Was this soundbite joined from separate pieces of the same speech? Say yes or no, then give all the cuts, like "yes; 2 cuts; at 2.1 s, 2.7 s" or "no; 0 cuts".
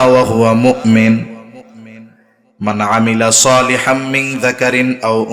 no; 0 cuts